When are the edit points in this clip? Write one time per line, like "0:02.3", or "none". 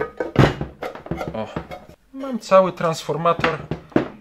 0:01.9